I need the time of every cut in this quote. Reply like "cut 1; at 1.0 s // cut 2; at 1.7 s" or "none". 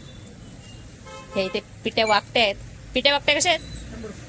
none